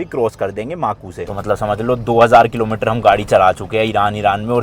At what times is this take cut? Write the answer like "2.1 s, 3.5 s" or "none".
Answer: 1.1 s